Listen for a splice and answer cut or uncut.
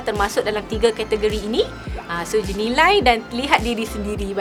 uncut